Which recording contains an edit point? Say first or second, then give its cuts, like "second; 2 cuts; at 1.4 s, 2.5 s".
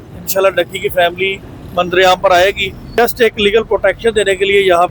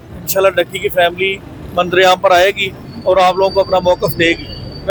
first; 1 cut; at 2.8 s